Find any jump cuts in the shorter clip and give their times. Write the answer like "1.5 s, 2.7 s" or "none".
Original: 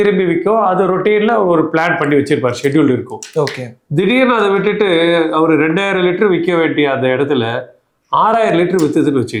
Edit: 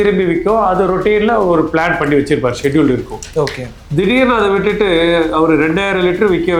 none

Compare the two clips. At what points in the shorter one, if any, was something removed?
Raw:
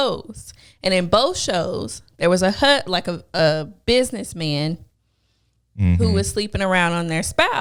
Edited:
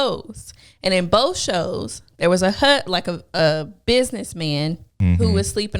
4.9 s

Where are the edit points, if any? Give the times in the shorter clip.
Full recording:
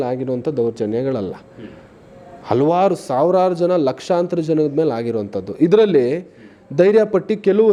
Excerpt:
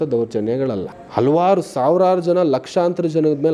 1.0 s

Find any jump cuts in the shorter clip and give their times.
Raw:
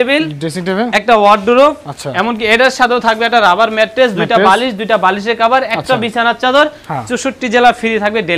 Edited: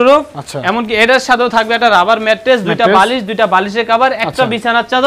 none

